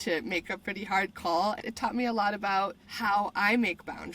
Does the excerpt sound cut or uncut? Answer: cut